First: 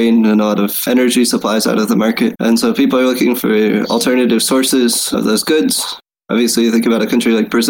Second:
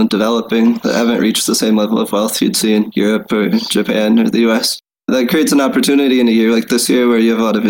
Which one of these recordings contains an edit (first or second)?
first